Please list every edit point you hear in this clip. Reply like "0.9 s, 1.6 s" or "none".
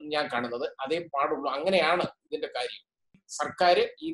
3.2 s